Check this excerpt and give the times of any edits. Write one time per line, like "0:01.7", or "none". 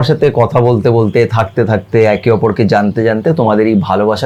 none